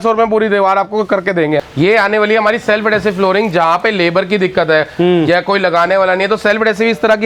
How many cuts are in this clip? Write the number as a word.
one